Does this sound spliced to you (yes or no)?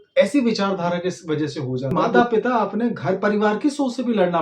yes